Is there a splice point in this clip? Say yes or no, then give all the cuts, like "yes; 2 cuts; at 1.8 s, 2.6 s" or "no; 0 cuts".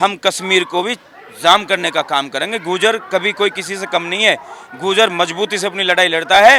no; 0 cuts